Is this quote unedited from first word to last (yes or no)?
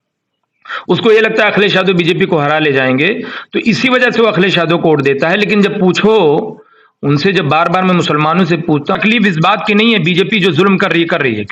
no